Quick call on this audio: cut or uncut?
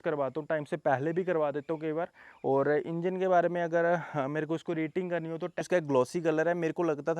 cut